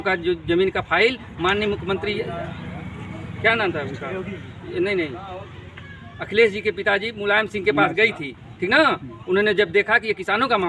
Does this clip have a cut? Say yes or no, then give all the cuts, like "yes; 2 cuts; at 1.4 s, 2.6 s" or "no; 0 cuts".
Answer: no; 0 cuts